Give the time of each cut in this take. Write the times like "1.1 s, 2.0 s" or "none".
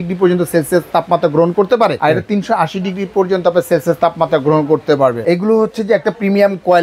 2.0 s, 5.2 s